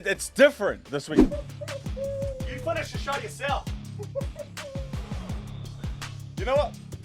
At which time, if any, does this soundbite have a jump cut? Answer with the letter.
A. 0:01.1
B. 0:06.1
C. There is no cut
A